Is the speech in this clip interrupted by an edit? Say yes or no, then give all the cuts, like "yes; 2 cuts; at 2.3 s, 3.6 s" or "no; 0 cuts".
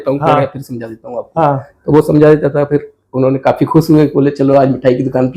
no; 0 cuts